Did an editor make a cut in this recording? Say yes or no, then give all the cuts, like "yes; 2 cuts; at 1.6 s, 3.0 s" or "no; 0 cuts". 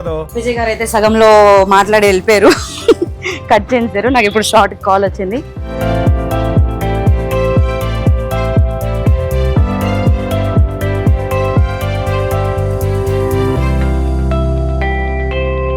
yes; 1 cut; at 5.6 s